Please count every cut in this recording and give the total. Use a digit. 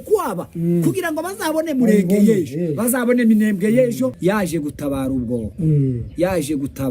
1